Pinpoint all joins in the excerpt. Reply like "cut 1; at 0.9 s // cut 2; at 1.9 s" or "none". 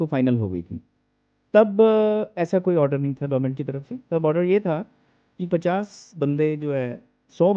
none